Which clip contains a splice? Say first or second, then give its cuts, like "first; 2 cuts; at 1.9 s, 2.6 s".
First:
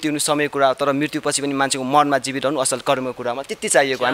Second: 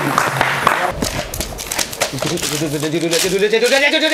second; 1 cut; at 0.9 s